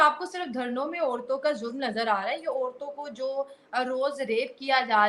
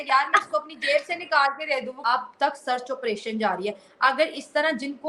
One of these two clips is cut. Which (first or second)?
second